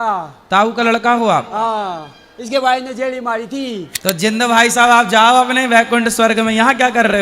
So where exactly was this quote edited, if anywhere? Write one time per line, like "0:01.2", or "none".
0:04.2